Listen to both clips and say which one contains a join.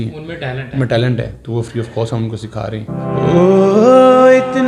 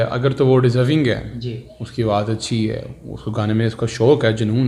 first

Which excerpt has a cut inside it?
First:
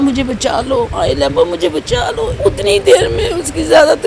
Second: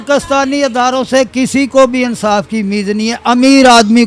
first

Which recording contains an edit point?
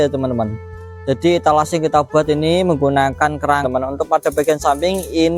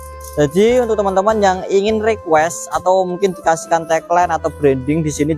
first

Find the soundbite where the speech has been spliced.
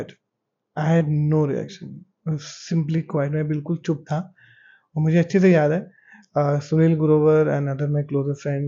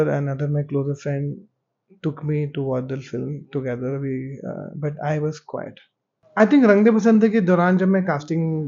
second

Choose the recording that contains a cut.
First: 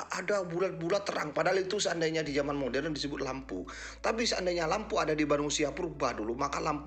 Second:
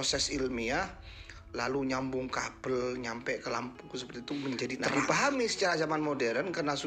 second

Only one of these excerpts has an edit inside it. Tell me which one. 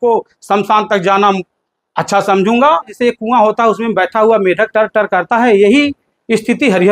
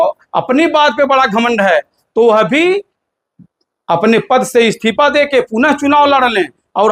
first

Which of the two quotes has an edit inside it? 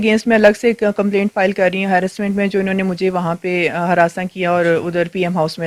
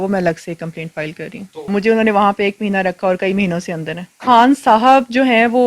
second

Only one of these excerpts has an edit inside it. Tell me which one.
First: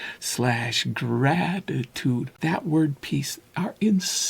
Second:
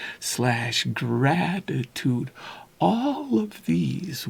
first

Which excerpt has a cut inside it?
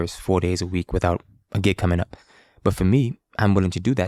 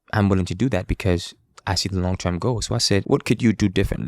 second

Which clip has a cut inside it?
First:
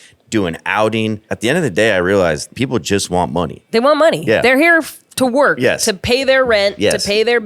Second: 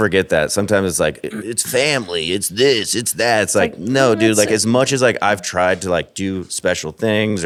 first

